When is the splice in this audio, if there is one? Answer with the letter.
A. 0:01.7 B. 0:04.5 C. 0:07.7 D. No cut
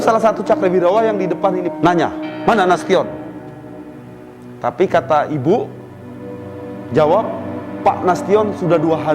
A